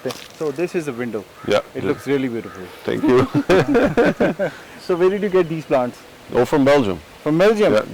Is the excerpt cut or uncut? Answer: uncut